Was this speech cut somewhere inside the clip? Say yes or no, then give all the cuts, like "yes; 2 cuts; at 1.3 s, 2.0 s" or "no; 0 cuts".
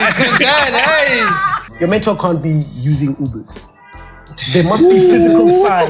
yes; 1 cut; at 1.6 s